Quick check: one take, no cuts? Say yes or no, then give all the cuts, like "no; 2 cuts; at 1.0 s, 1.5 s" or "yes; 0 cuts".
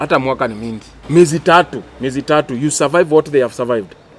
no; 1 cut; at 0.9 s